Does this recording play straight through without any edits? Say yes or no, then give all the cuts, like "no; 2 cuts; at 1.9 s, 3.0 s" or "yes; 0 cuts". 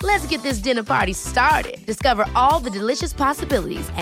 yes; 0 cuts